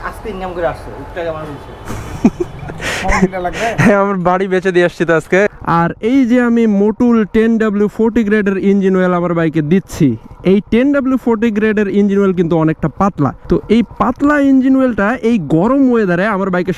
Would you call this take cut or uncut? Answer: cut